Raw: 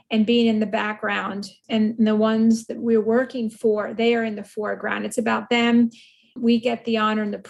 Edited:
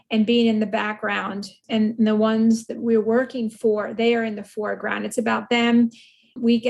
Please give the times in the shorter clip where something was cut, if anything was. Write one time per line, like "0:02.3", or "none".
none